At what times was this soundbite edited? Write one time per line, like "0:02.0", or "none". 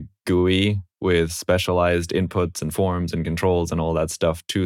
none